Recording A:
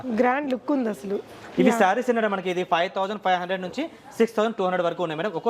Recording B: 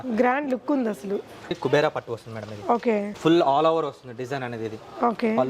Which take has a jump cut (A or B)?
B